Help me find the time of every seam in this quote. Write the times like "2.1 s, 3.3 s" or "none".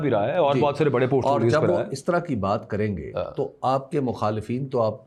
none